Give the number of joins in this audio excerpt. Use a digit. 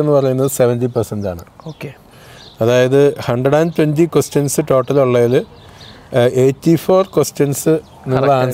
0